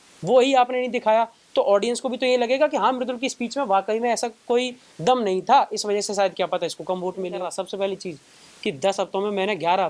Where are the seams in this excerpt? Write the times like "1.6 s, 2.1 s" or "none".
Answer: 7.5 s